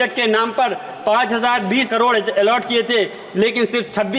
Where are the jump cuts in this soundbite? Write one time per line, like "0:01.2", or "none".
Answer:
0:01.9